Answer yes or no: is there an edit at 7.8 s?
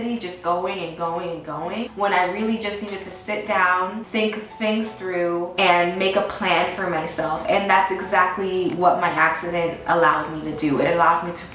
no